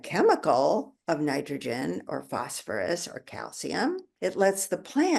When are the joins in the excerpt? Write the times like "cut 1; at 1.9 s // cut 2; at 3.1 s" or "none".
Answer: cut 1; at 0.9 s // cut 2; at 4.1 s